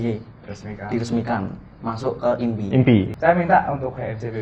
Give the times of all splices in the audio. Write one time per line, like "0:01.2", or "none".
0:03.1